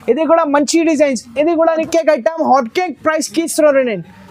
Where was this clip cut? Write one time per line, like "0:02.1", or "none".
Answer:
0:01.8